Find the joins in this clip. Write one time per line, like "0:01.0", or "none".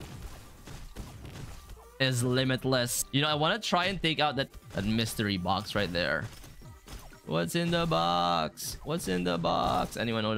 0:03.0
0:04.6

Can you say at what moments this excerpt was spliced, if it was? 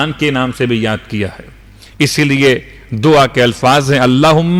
none

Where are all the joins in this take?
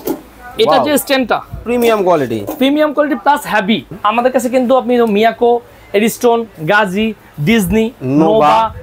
0:03.9

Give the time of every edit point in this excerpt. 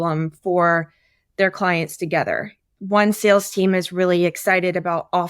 0:02.6

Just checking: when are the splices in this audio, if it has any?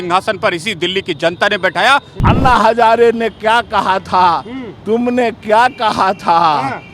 0:02.1

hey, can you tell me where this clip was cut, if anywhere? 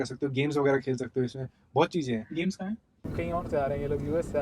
0:03.1

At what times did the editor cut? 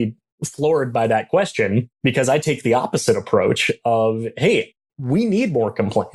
0:01.9

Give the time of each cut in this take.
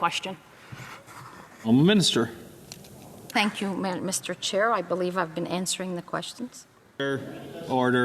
0:07.1

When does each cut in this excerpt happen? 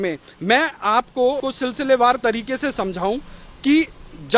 0:01.4

